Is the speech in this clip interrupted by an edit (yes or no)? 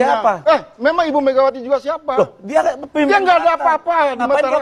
no